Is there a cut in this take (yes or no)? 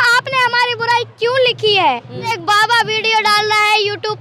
yes